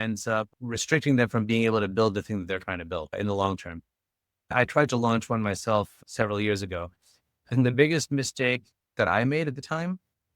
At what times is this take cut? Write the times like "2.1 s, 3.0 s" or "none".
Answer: 4.5 s, 8.9 s